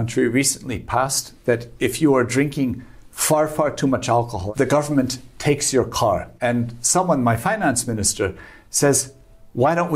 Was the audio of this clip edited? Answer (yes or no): yes